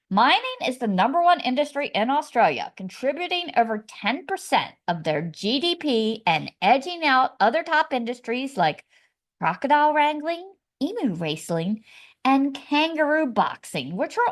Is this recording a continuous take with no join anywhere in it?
yes; 0 cuts

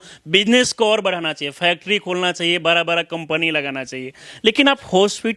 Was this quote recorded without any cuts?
yes; 0 cuts

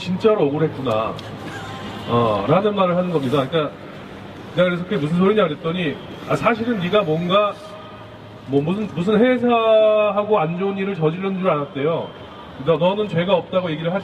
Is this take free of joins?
yes; 0 cuts

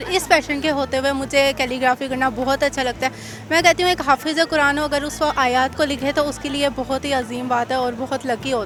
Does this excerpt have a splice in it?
no; 0 cuts

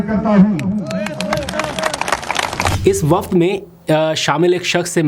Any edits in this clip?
yes; 1 cut; at 2.8 s

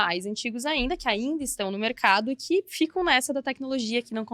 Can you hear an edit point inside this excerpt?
no; 0 cuts

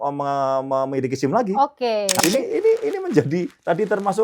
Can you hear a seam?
yes; 1 cut; at 2.2 s

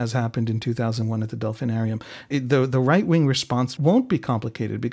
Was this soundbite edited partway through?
yes; 2 cuts; at 2.3 s, 3.8 s

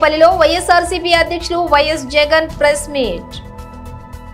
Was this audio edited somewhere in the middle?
yes; 1 cut; at 3.4 s

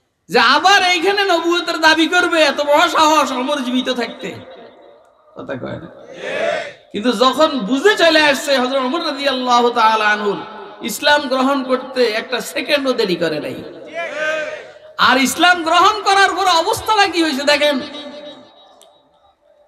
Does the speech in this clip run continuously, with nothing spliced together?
no; 1 cut; at 18.7 s

